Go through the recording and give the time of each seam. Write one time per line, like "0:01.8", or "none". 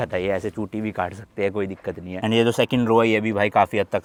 none